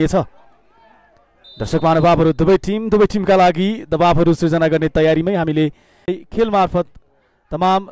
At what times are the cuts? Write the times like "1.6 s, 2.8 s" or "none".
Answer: 6.1 s